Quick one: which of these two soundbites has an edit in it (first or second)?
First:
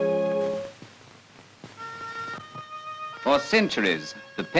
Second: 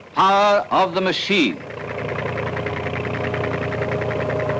first